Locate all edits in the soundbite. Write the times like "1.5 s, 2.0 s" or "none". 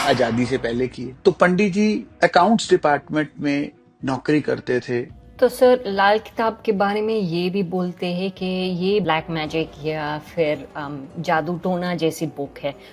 1.1 s, 2.1 s, 5.2 s, 9.0 s